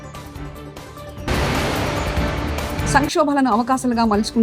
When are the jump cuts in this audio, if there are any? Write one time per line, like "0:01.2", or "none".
0:01.3
0:02.8